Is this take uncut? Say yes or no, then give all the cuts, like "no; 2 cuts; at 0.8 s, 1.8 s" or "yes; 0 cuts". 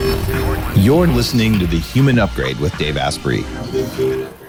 yes; 0 cuts